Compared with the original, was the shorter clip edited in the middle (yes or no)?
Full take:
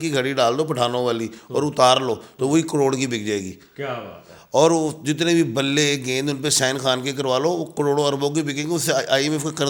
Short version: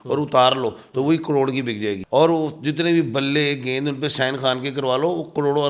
yes